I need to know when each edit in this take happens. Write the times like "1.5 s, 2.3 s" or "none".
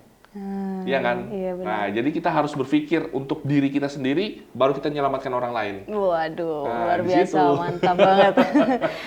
none